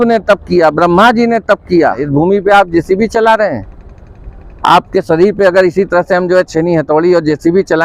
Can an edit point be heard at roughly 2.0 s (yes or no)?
yes